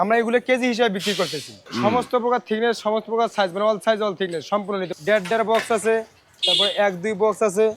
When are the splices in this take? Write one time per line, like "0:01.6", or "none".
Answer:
0:01.7
0:04.9